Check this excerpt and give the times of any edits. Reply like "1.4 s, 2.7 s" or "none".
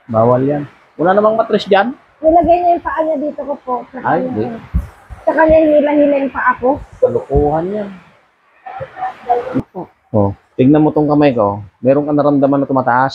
9.6 s